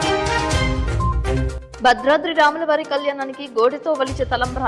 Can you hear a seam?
yes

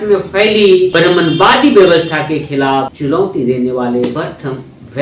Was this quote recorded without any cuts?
no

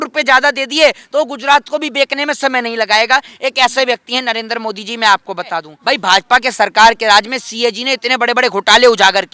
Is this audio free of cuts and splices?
no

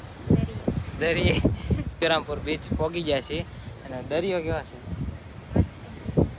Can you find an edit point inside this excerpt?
yes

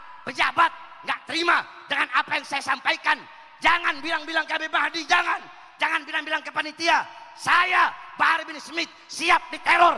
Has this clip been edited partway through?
no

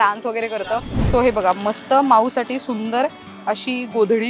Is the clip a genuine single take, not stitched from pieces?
no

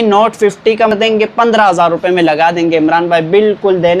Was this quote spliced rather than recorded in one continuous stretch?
yes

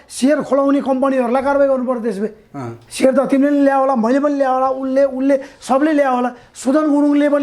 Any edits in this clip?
no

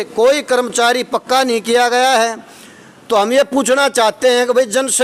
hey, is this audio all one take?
yes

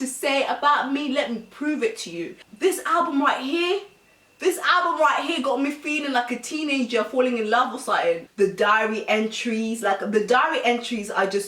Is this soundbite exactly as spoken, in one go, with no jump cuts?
no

